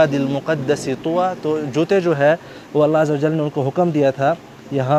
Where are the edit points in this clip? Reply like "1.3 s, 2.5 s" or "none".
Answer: none